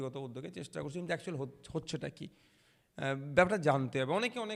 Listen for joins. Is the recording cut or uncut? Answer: uncut